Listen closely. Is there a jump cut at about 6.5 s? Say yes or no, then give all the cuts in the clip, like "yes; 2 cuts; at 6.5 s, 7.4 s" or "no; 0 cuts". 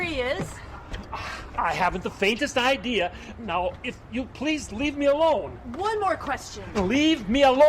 yes; 1 cut; at 6.5 s